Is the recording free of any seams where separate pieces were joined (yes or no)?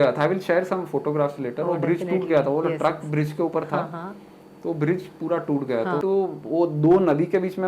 no